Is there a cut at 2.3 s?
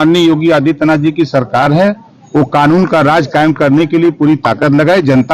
no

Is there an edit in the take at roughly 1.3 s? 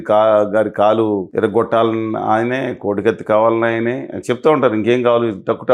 yes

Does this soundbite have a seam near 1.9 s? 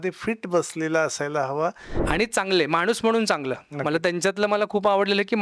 yes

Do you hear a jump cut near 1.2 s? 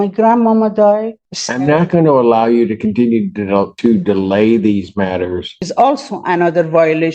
yes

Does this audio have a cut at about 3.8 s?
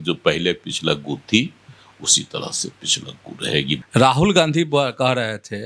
yes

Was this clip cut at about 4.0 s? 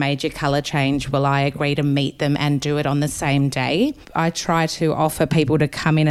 yes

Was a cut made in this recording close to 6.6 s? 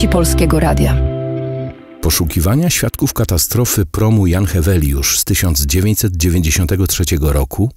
no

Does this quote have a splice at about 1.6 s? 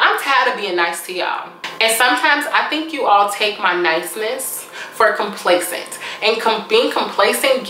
yes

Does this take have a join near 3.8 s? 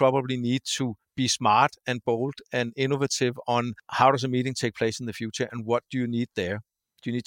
yes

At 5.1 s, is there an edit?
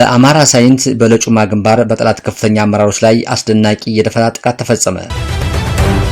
yes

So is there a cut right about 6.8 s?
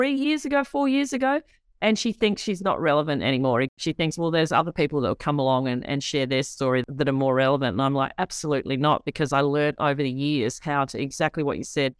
yes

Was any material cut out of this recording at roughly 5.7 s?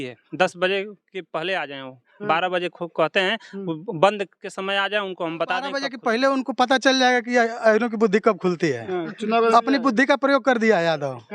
yes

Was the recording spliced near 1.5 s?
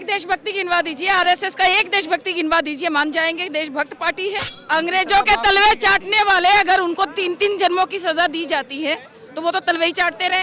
no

